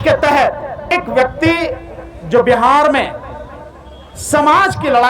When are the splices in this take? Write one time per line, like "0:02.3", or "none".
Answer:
0:00.9